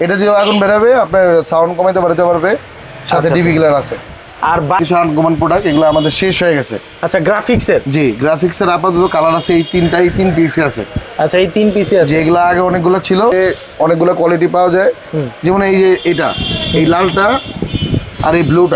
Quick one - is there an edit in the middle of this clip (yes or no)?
yes